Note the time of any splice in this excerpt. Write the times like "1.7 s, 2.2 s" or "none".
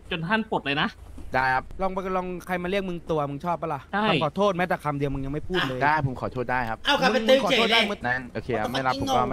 1.7 s, 3.8 s, 8.0 s